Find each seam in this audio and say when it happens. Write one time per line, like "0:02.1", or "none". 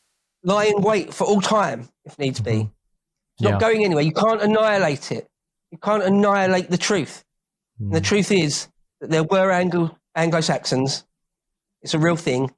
none

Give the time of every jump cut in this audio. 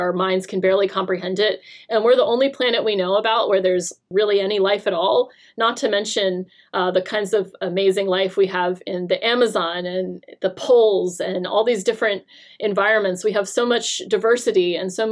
0:04.0

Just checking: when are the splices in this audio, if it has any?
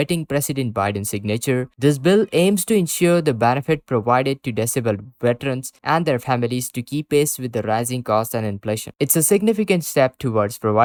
none

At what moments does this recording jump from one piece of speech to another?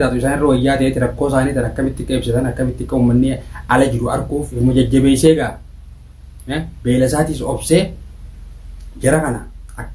0:04.5

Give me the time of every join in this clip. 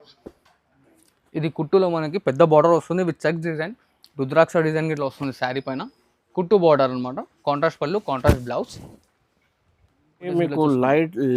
0:10.3

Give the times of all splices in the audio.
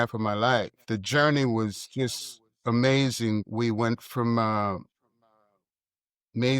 0:00.8
0:03.5

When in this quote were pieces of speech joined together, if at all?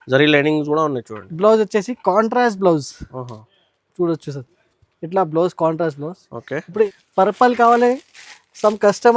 0:06.8

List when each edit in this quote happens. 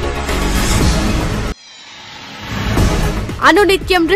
0:01.5

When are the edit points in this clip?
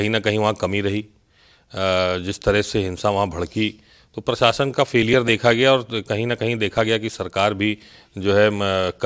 none

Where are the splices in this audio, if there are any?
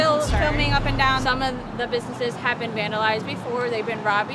0:01.2

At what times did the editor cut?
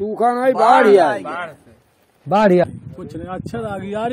0:02.6

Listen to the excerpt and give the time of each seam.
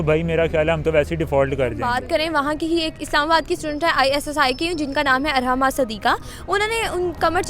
0:01.8

